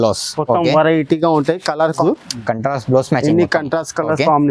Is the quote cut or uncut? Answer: cut